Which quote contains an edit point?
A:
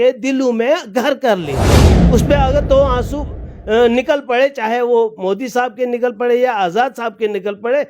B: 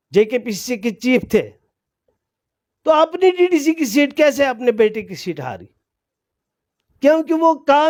A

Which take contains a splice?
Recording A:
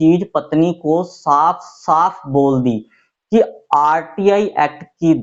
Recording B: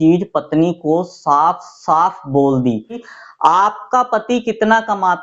B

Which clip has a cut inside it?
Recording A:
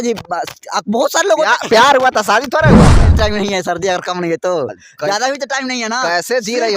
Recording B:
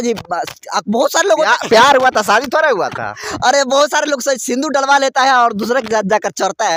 A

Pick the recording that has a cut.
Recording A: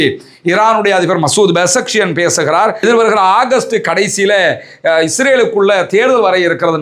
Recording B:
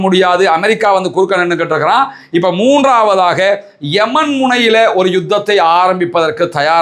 A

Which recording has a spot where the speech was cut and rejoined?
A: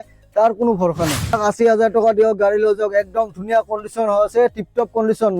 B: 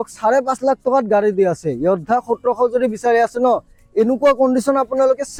A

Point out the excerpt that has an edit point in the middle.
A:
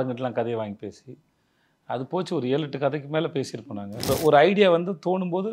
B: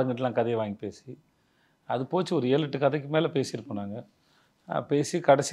A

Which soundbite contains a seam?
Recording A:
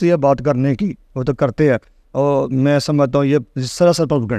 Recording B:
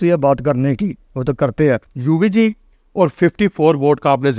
B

